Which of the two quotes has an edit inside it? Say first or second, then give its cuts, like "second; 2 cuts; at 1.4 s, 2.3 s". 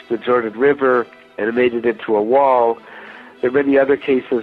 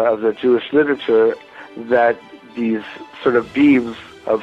first; 1 cut; at 1.2 s